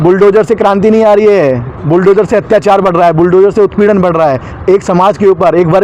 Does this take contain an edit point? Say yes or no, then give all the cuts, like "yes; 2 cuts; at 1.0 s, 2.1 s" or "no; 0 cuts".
no; 0 cuts